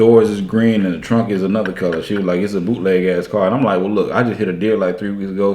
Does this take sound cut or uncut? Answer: uncut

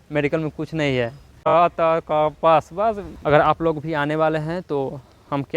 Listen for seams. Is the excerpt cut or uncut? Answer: cut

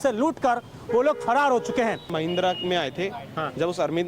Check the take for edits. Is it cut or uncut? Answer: cut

